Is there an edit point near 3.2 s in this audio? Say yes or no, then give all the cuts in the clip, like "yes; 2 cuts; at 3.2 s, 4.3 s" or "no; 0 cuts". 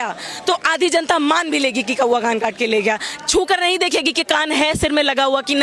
no; 0 cuts